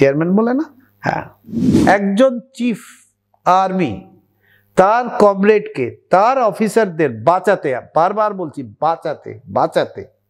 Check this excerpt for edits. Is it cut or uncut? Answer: cut